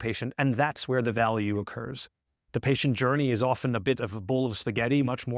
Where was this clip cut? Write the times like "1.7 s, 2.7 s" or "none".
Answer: 2.4 s